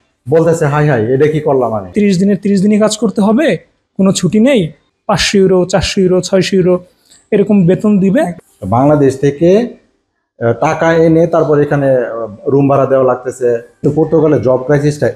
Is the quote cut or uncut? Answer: cut